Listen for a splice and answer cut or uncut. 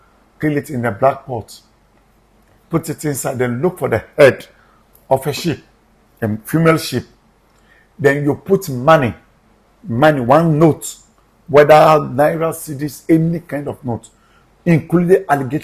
uncut